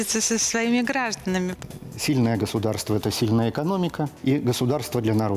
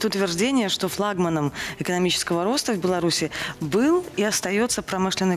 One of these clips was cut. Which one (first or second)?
first